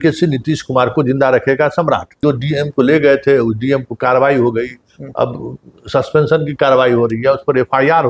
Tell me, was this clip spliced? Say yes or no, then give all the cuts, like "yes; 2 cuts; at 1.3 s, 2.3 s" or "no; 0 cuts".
yes; 1 cut; at 2.1 s